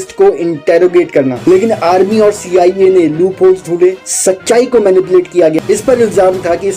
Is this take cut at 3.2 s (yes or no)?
no